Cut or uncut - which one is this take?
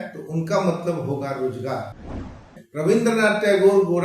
cut